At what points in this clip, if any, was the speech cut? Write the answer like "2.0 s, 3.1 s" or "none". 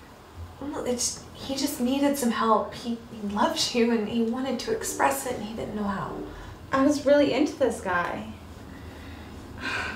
4.9 s